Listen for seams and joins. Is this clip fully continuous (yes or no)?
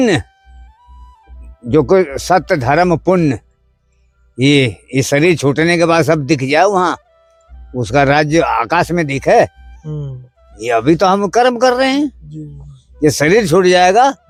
yes